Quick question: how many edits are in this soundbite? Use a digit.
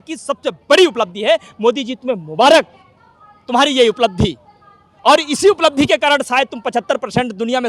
0